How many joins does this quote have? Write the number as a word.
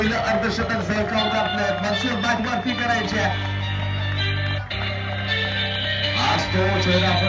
zero